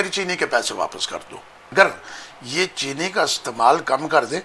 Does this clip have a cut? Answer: yes; 1 cut; at 1.7 s

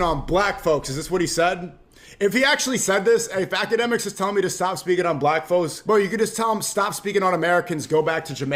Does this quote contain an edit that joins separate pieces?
no; 0 cuts

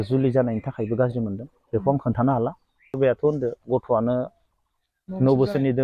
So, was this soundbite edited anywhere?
yes; 1 cut; at 3.0 s

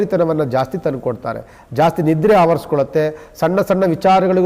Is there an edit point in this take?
no; 0 cuts

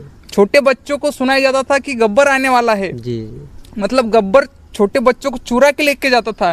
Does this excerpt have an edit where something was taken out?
no; 0 cuts

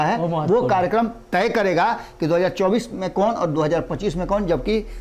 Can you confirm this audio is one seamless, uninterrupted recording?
yes; 0 cuts

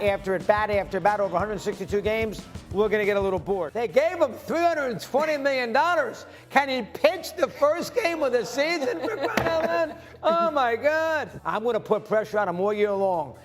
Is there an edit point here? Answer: yes; 2 cuts; at 3.7 s, 11.4 s

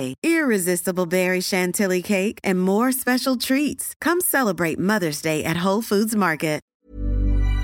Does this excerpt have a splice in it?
yes; 1 cut; at 6.7 s

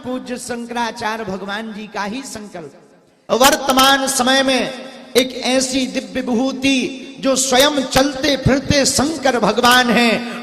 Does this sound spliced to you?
yes; 1 cut; at 3.1 s

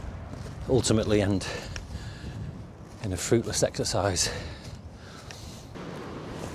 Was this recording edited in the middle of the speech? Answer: yes; 1 cut; at 5.4 s

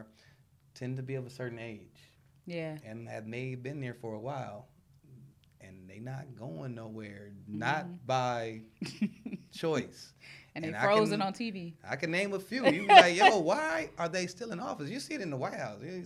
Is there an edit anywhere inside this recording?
no; 0 cuts

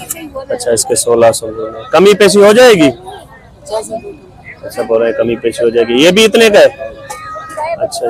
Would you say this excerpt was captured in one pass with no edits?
yes; 0 cuts

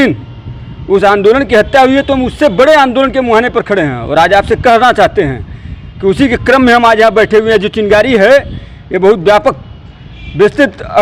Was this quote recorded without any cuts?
yes; 0 cuts

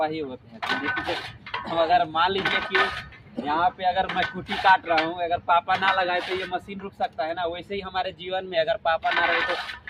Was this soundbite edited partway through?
no; 0 cuts

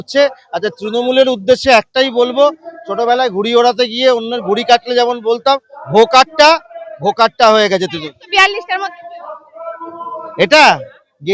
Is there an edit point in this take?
no; 0 cuts

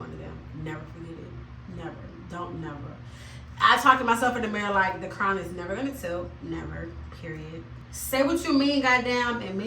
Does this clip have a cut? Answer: yes; 1 cut; at 7.9 s

